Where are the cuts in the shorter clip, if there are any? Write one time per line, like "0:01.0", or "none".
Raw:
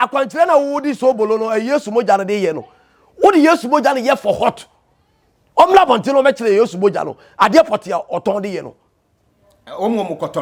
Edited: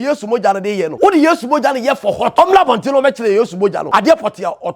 0:00.9
0:02.3
0:03.8